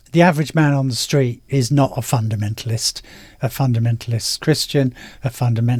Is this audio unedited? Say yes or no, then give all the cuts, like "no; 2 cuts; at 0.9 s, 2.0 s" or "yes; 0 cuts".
yes; 0 cuts